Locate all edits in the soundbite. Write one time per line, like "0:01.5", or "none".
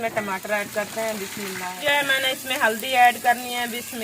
0:01.7